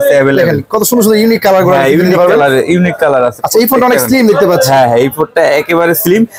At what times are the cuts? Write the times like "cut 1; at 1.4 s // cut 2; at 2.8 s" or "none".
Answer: none